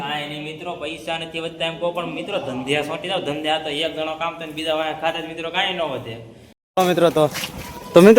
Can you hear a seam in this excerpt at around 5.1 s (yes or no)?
no